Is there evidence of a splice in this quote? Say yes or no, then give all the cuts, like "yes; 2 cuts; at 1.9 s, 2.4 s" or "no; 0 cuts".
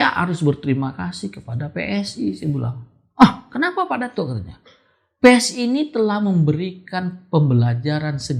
no; 0 cuts